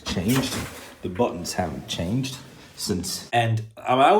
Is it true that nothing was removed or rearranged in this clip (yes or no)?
no